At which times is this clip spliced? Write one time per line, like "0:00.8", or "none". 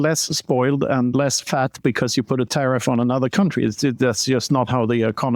none

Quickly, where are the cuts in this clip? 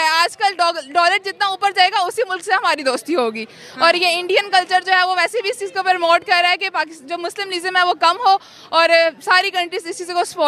none

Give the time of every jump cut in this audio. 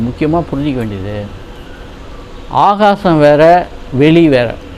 0:02.0

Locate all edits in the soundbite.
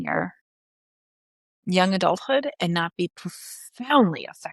none

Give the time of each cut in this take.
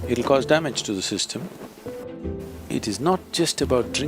0:02.1

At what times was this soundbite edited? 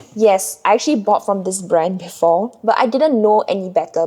0:02.5

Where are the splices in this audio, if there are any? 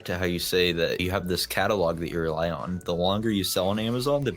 0:01.0

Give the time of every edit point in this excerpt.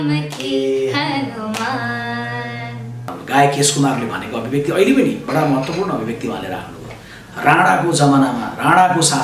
0:03.1

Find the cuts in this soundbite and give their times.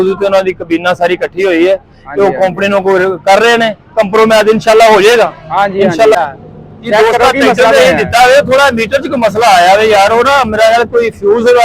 0:06.2

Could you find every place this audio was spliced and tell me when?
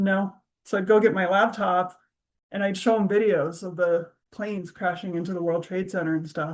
none

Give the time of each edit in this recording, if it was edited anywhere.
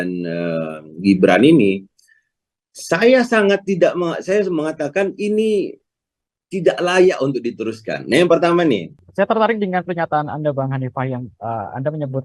0:09.0

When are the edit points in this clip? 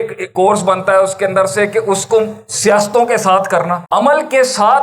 0:03.8

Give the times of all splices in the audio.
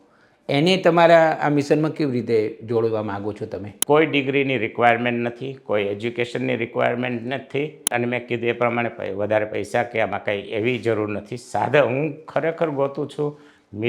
0:03.7

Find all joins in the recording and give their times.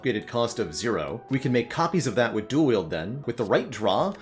0:01.2
0:03.3

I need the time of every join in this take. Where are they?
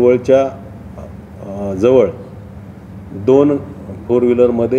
none

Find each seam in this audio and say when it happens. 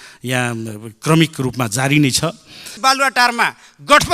0:02.7

